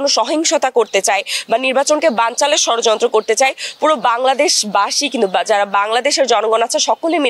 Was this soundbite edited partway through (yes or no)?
no